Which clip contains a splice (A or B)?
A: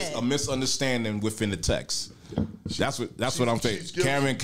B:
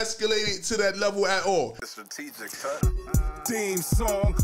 B